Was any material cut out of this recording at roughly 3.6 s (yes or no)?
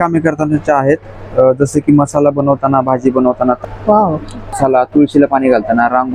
yes